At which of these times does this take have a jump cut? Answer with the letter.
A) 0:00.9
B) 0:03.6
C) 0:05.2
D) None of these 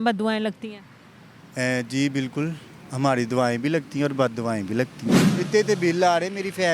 C